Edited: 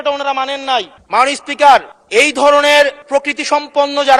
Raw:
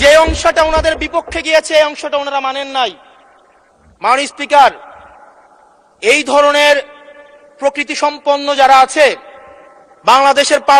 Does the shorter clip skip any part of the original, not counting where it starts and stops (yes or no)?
yes